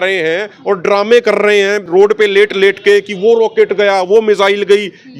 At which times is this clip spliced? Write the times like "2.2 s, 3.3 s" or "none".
1.8 s